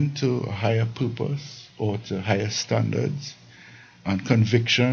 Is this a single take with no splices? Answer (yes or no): yes